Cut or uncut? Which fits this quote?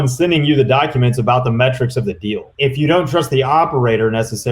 cut